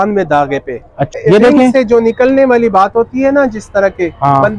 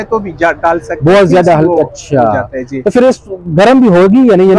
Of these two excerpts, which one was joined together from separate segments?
first; 1 cut; at 1.2 s

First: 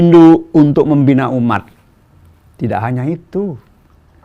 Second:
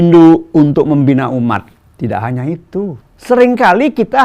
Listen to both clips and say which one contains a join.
second; 2 cuts; at 1.8 s, 3.1 s

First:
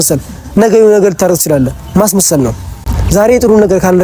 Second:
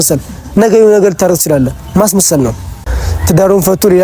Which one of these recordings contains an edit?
second; 1 cut; at 2.9 s

